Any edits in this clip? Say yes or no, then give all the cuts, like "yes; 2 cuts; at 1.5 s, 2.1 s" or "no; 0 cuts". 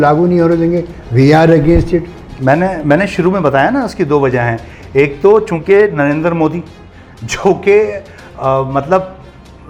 no; 0 cuts